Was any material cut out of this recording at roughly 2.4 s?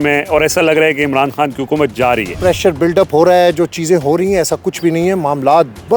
yes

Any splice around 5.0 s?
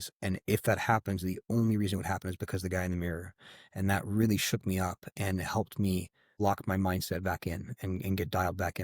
no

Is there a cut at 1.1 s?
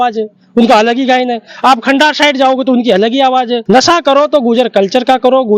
no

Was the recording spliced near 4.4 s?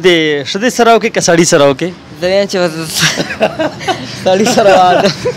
no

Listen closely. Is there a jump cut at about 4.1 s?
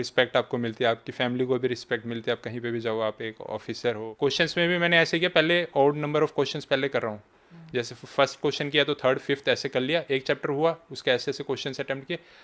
yes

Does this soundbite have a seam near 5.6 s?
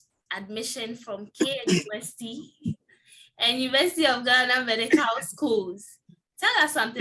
no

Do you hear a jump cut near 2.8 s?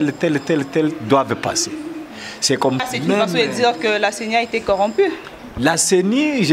yes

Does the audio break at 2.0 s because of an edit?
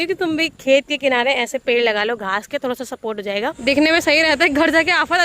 no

